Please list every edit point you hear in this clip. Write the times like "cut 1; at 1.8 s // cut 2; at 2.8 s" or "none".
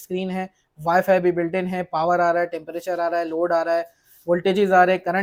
none

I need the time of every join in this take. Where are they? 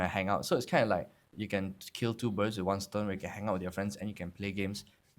cut 1; at 1.3 s

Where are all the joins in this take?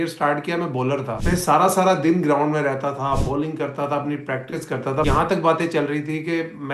cut 1; at 1.2 s // cut 2; at 5.1 s

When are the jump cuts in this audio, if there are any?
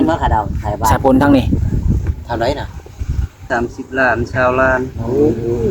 cut 1; at 3.5 s

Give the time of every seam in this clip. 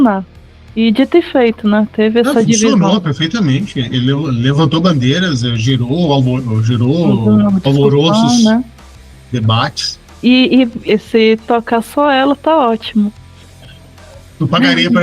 cut 1; at 10.8 s

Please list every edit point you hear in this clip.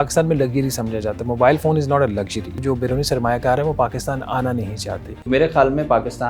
cut 1; at 2.6 s // cut 2; at 5.2 s

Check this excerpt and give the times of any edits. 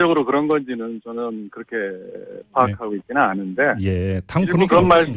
cut 1; at 3.6 s

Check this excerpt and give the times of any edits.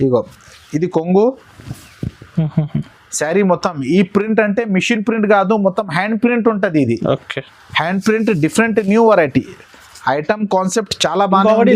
none

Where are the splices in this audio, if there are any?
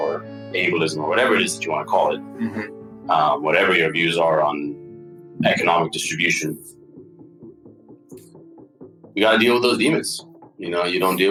none

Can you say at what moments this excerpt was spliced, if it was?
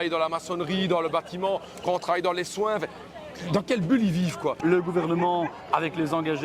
cut 1; at 4.6 s

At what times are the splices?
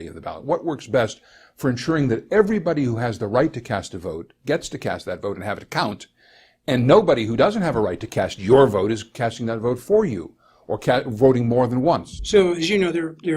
cut 1; at 12.1 s

